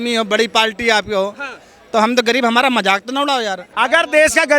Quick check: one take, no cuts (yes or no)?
no